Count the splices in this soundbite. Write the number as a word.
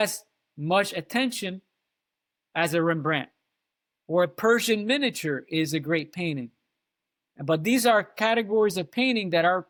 zero